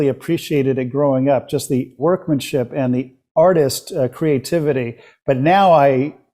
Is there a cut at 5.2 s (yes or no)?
no